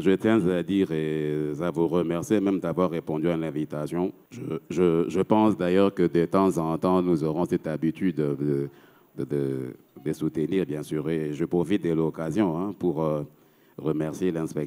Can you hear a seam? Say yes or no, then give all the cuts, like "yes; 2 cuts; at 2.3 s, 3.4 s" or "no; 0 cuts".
yes; 1 cut; at 4.3 s